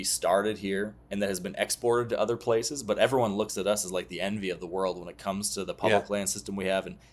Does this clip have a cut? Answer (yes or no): no